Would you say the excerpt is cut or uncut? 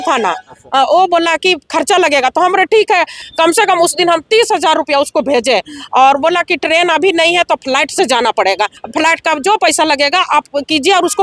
cut